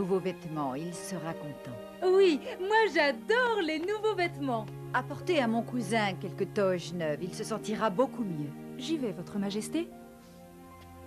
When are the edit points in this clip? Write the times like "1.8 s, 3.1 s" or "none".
4.0 s